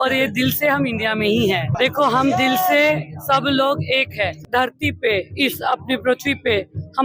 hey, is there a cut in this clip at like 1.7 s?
yes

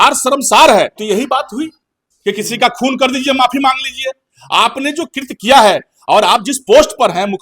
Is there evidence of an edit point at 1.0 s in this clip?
yes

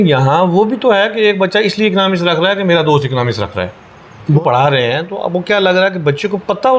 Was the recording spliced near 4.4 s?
yes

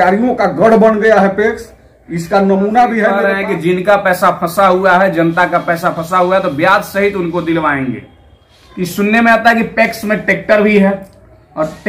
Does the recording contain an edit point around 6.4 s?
no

